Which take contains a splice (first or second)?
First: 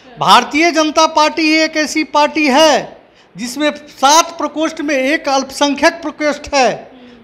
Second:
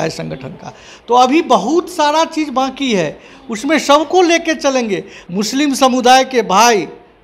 second